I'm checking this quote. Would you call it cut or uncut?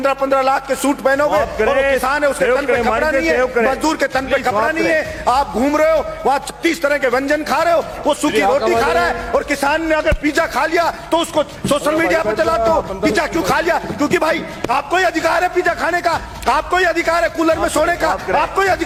uncut